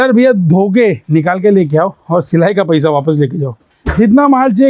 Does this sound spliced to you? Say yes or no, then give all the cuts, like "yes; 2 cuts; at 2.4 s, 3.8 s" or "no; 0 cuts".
yes; 2 cuts; at 1.0 s, 3.8 s